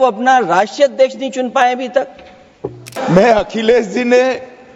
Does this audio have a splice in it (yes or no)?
yes